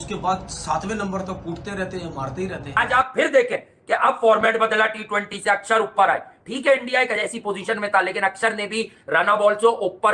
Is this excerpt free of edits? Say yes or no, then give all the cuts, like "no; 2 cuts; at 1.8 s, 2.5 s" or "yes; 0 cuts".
no; 1 cut; at 2.8 s